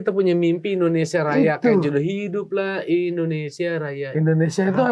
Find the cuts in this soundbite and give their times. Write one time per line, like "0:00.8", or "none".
none

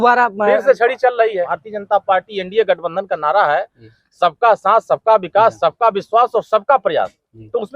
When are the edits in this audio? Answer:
0:01.5

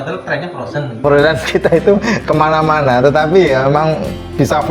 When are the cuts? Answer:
0:01.0

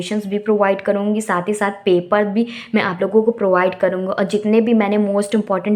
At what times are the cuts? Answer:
none

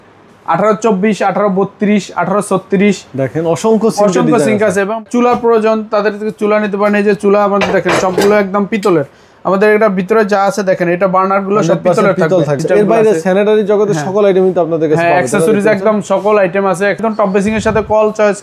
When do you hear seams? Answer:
0:05.0
0:12.6
0:17.0

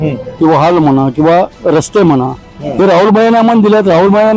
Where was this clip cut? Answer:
none

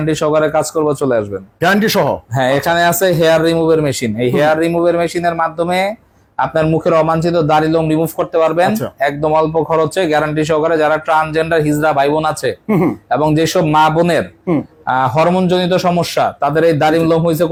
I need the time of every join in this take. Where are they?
none

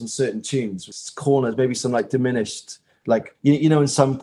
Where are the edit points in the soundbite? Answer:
0:00.8
0:03.2

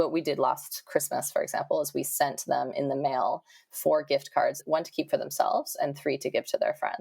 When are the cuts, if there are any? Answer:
0:04.6

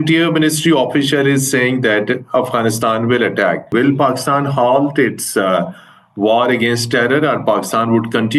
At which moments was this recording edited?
0:03.7

